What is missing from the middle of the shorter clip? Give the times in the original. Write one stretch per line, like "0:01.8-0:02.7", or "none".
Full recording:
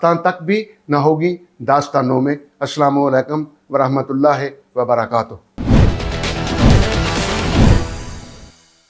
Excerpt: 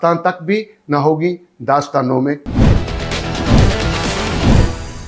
0:02.4-0:05.6